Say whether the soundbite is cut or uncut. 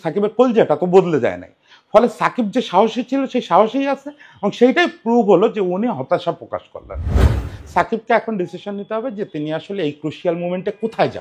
cut